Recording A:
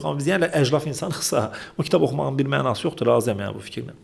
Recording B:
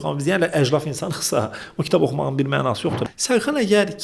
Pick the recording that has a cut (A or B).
B